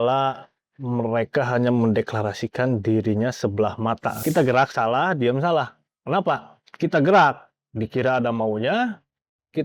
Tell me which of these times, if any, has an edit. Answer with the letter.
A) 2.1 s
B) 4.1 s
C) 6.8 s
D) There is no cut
B